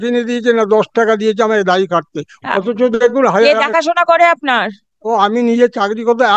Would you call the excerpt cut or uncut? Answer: uncut